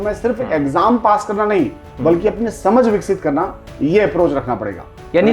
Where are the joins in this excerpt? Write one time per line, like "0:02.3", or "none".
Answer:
none